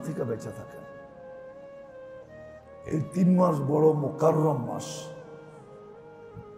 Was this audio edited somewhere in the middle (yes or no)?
yes